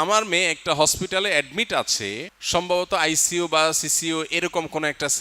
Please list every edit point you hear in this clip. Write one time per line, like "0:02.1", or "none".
none